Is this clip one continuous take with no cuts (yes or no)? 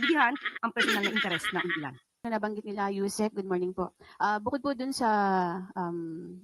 no